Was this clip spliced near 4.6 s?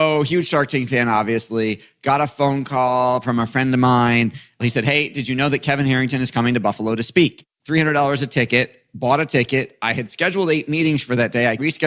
yes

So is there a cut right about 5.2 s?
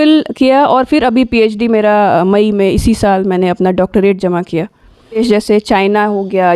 yes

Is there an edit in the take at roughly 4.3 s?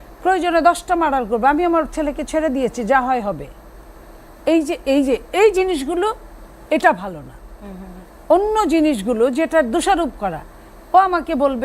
no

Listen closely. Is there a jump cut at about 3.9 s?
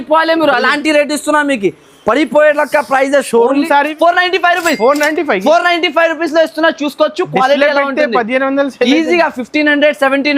yes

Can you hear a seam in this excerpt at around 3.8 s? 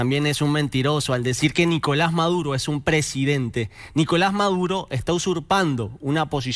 no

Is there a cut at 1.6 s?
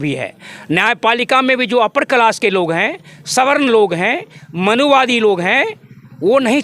no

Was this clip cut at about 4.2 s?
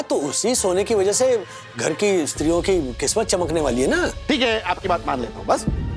yes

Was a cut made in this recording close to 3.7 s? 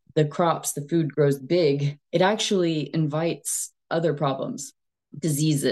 no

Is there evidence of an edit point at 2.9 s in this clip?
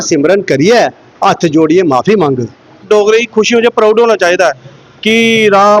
yes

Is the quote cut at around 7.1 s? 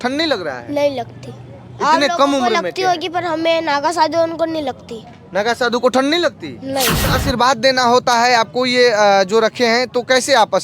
yes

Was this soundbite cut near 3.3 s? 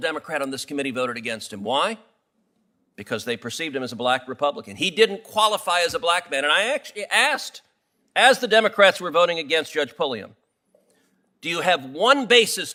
no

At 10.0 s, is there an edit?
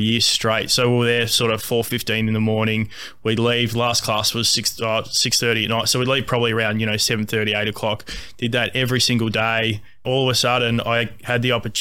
yes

